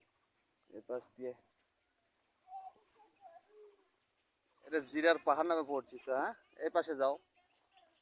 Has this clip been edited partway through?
yes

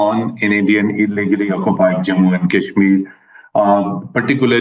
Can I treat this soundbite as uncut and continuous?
yes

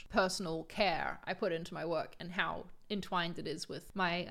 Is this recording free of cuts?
yes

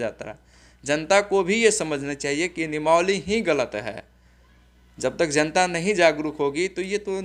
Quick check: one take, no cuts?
yes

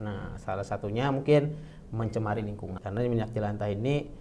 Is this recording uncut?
no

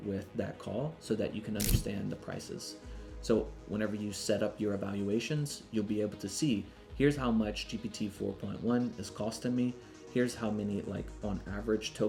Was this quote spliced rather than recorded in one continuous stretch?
no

